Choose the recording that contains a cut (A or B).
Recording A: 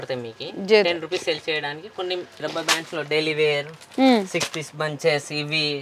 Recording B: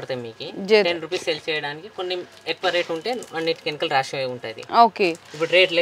A